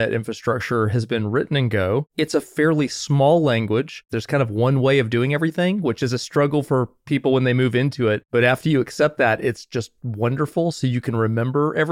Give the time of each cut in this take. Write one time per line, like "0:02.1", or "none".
0:02.1
0:04.1
0:08.2